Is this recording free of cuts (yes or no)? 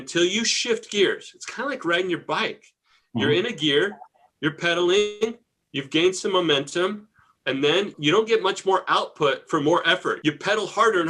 no